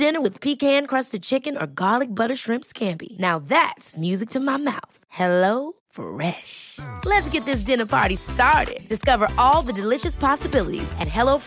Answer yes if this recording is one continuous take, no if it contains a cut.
yes